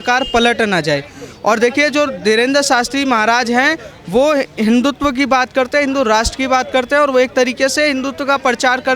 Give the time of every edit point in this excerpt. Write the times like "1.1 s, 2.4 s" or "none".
none